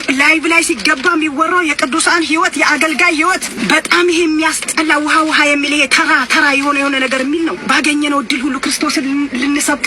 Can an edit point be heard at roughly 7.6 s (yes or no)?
yes